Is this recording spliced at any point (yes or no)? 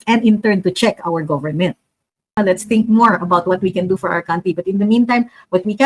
yes